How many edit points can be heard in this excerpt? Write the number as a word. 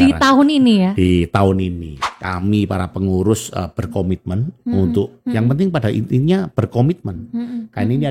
one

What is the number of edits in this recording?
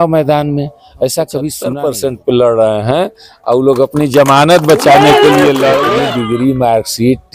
two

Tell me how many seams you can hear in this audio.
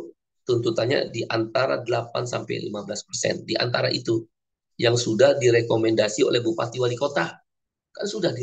zero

